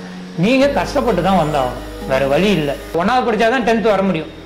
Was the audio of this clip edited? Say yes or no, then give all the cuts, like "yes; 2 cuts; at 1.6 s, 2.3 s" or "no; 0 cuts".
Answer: yes; 1 cut; at 2.9 s